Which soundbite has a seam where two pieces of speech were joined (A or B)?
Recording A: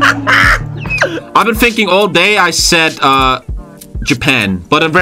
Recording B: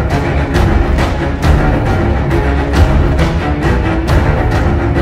A